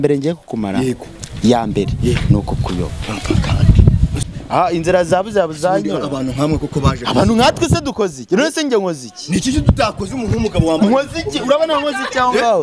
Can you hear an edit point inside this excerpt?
yes; 1 cut; at 4.2 s

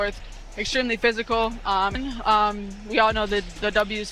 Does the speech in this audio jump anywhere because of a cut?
yes; 1 cut; at 2.0 s

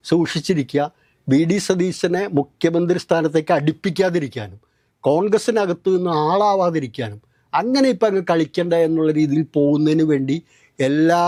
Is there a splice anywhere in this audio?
no; 0 cuts

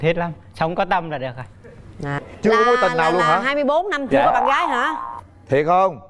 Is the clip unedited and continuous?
no; 1 cut; at 2.2 s

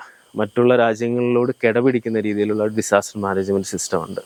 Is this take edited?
no; 0 cuts

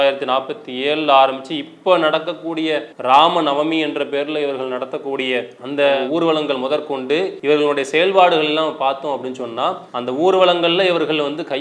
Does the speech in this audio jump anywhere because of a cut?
yes; 2 cuts; at 2.9 s, 7.3 s

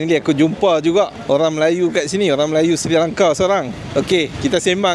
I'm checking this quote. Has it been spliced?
no; 0 cuts

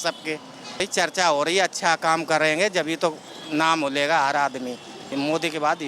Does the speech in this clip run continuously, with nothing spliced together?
no; 2 cuts; at 0.9 s, 4.9 s

